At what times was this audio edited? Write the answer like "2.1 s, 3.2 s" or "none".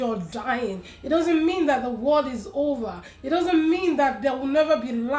none

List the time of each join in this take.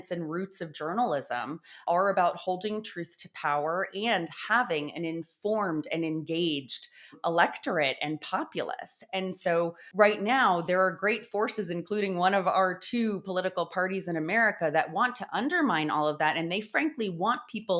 1.8 s, 9.8 s

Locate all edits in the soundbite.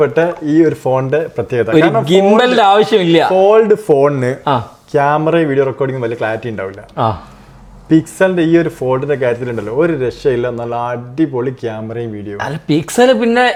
none

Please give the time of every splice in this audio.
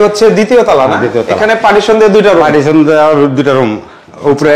none

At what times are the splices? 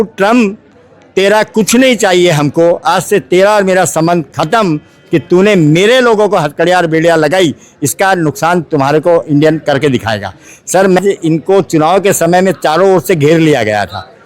11.0 s

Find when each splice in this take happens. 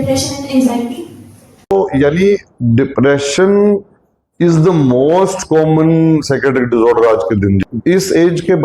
1.6 s, 7.6 s

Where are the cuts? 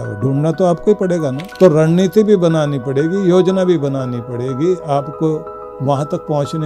1.4 s

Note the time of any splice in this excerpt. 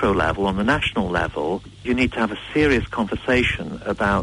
1.9 s

